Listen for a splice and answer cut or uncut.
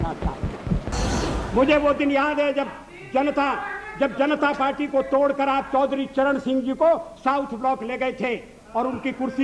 cut